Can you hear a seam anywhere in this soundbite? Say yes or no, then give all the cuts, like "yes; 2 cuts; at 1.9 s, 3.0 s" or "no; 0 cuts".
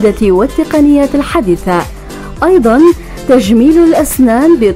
no; 0 cuts